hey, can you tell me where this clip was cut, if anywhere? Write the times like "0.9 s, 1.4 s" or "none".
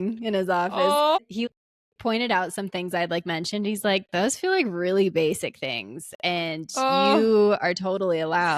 1.2 s